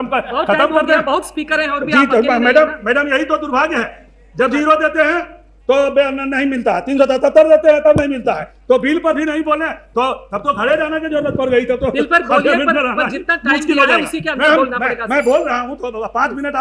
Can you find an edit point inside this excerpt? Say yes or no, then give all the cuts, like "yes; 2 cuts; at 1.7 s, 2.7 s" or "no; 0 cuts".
no; 0 cuts